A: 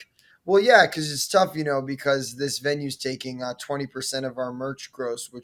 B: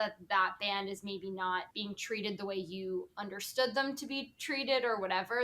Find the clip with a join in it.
B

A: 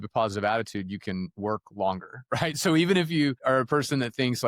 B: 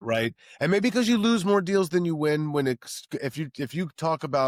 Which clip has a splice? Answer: A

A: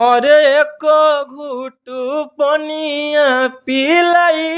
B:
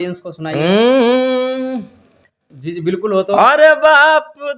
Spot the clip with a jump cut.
B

